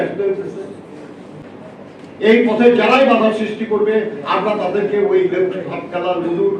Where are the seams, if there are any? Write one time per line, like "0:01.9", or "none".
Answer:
0:01.3